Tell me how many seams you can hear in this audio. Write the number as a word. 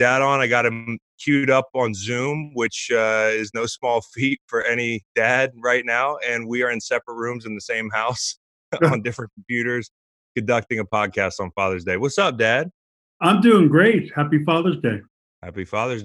zero